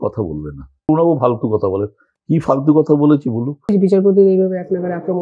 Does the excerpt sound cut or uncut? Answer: cut